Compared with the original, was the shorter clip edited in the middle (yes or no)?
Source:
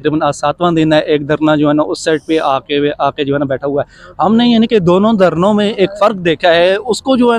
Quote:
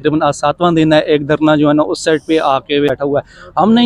yes